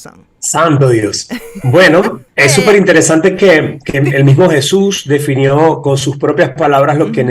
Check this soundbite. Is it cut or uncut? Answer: cut